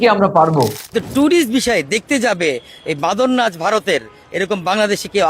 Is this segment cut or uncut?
cut